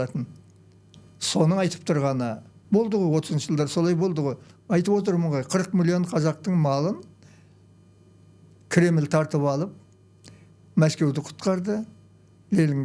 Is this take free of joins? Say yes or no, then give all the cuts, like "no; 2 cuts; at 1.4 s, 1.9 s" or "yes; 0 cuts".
no; 1 cut; at 2.5 s